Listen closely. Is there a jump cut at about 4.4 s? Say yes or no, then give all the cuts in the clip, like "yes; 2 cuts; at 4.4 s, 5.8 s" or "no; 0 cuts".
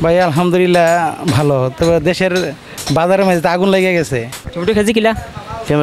yes; 1 cut; at 4.4 s